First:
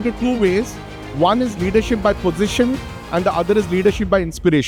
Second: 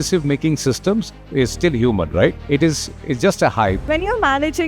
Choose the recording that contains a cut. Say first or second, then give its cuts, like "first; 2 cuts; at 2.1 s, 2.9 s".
second; 3 cuts; at 1.2 s, 2.4 s, 3.8 s